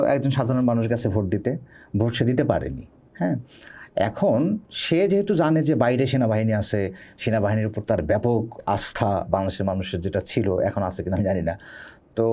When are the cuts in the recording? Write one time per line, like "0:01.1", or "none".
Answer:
none